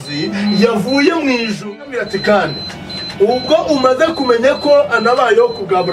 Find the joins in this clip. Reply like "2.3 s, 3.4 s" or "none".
1.6 s